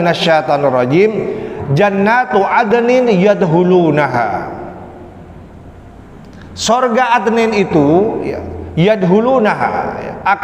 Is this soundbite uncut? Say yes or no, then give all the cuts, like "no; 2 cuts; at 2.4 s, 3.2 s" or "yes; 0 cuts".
yes; 0 cuts